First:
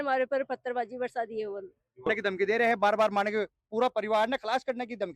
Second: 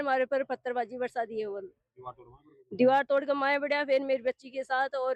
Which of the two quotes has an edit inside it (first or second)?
first